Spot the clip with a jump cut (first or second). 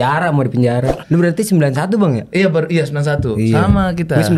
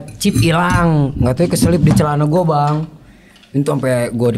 first